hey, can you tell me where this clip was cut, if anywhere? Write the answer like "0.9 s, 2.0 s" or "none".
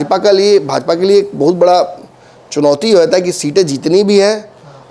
none